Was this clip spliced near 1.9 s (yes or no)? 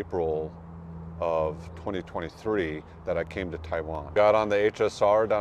no